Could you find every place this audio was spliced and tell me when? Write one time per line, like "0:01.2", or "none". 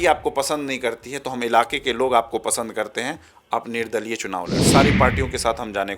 0:04.7